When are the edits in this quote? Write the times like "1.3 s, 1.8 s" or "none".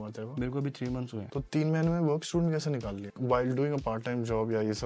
3.1 s